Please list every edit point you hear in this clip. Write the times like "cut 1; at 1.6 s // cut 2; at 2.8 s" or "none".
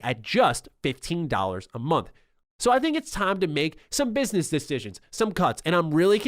cut 1; at 2.3 s